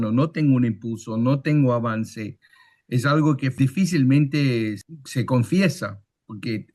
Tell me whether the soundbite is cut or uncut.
cut